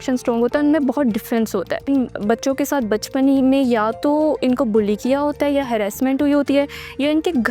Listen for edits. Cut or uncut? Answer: cut